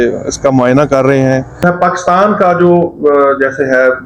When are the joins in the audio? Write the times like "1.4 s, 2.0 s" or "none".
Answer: 1.6 s